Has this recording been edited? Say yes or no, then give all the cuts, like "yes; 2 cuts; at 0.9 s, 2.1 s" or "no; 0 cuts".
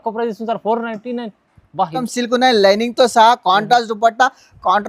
yes; 1 cut; at 2.1 s